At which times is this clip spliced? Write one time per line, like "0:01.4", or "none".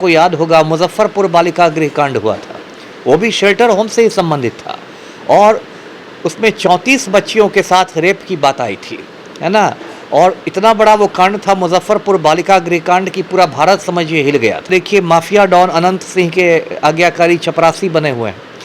0:14.7